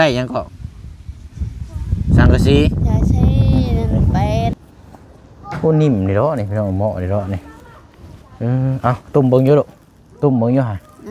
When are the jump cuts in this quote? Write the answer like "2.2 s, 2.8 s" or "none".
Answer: 4.5 s